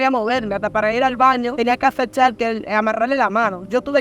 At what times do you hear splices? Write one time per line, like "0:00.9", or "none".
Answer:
0:01.5